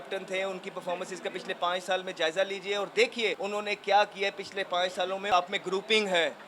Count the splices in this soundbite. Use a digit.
2